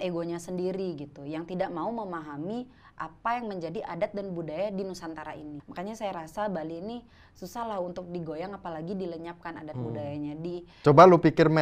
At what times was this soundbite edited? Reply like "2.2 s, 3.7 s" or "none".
5.6 s, 10.7 s